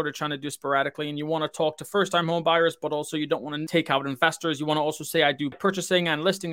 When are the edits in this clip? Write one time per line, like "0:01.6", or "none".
0:03.6
0:05.5